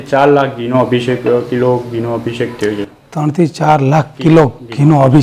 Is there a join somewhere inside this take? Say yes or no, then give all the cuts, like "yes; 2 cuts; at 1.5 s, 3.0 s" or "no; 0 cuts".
no; 0 cuts